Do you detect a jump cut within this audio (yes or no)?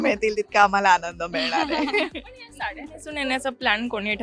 no